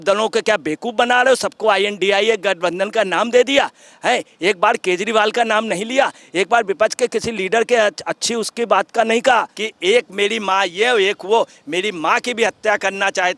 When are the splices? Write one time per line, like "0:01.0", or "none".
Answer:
0:09.6